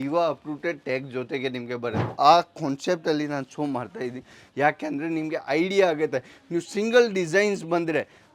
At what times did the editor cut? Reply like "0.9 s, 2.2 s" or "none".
2.1 s